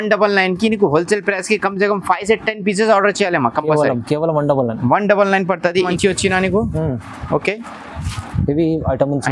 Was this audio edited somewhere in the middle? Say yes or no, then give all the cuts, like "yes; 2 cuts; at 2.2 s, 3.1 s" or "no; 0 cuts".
yes; 1 cut; at 5.9 s